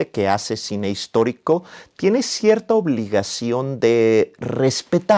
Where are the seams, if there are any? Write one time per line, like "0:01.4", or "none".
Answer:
none